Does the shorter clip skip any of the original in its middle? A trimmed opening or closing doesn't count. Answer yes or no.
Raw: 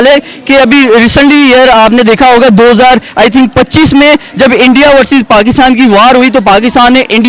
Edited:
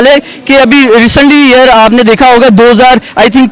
no